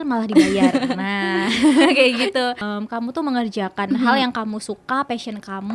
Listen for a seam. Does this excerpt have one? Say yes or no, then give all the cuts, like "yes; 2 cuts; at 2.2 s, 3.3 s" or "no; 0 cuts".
yes; 1 cut; at 2.7 s